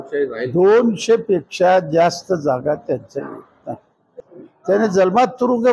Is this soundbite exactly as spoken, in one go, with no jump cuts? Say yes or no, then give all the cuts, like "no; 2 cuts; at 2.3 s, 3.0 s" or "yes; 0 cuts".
no; 1 cut; at 4.1 s